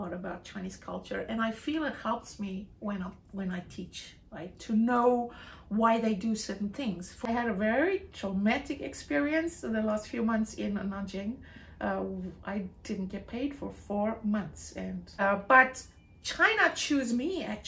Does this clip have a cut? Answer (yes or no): yes